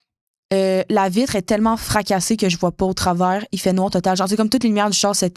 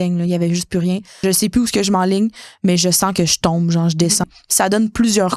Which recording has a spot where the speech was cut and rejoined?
second; 2 cuts; at 1.2 s, 4.3 s

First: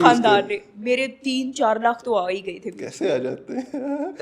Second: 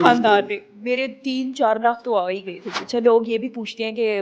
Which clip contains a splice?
second; 1 cut; at 2.8 s

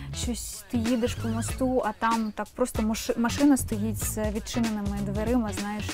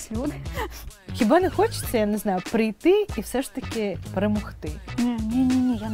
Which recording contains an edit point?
second; 3 cuts; at 1.0 s, 4.0 s, 4.8 s

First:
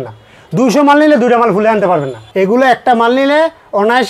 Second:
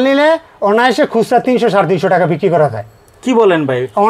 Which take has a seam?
first; 1 cut; at 2.2 s

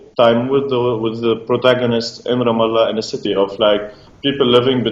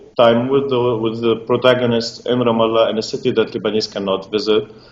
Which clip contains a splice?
second; 1 cut; at 3.2 s

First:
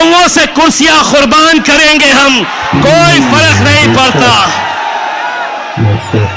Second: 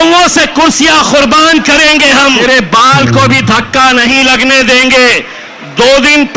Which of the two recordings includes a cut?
second; 1 cut; at 2.4 s

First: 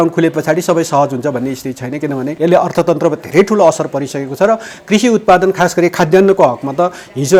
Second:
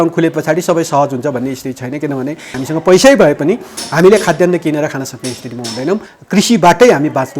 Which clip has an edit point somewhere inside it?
second; 2 cuts; at 2.3 s, 6.1 s

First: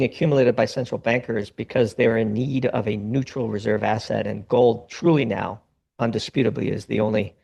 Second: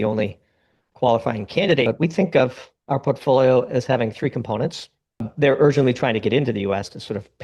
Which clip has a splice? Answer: second; 2 cuts; at 1.9 s, 5.3 s

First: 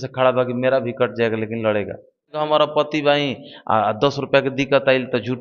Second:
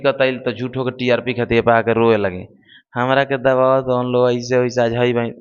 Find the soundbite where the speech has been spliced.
first; 1 cut; at 2.3 s

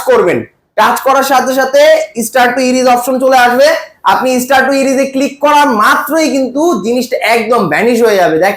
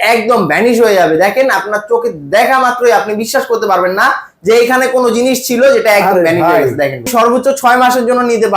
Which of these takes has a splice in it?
second; 1 cut; at 7.1 s

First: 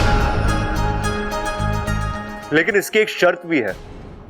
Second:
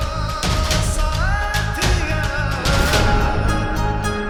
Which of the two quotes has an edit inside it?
first; 1 cut; at 2.3 s

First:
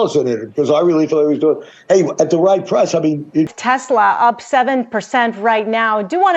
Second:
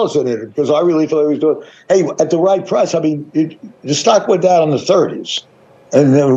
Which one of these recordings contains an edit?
first; 1 cut; at 3.6 s

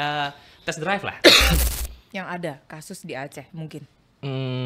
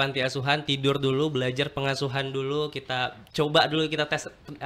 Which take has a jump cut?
first; 1 cut; at 1.6 s

